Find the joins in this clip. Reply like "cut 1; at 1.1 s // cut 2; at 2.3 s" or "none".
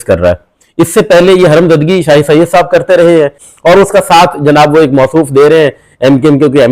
cut 1; at 3.4 s